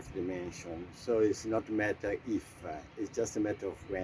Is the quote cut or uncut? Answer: uncut